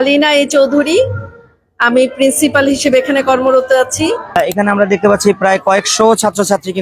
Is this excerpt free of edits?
no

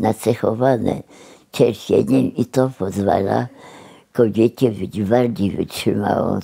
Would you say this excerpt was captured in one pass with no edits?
yes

